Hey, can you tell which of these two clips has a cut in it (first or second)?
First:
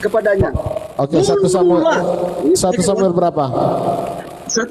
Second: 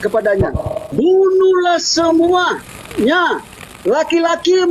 second